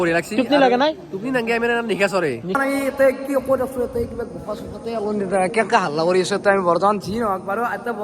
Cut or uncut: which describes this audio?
cut